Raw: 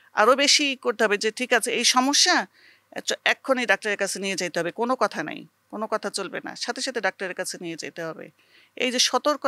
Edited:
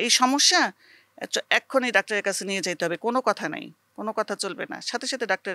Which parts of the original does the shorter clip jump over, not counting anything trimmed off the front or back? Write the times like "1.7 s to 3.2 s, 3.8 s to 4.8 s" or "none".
none